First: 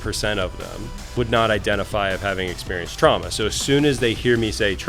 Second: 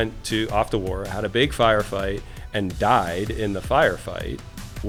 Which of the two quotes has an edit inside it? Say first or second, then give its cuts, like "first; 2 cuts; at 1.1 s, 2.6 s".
first; 1 cut; at 1.0 s